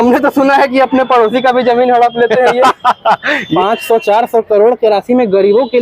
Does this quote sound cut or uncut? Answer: cut